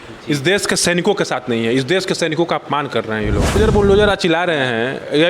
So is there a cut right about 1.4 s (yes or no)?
no